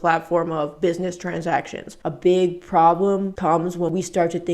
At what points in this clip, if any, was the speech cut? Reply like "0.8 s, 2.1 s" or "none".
2.0 s, 3.8 s